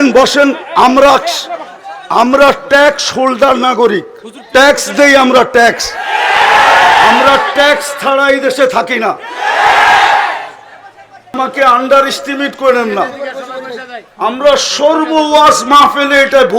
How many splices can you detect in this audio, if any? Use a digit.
1